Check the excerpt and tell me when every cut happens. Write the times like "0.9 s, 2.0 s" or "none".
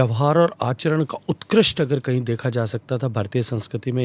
none